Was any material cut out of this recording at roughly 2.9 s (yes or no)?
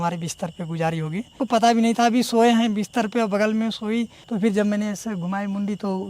no